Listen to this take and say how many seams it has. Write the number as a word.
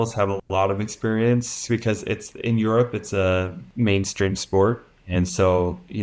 two